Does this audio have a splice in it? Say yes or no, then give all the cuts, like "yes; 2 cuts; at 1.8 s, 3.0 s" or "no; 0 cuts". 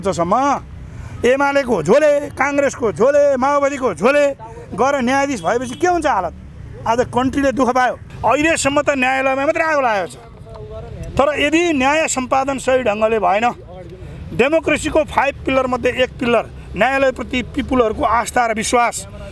yes; 1 cut; at 8.1 s